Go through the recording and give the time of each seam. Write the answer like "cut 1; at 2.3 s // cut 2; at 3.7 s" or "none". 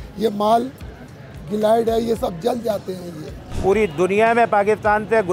cut 1; at 3.5 s